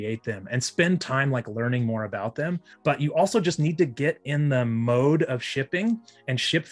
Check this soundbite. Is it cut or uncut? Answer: cut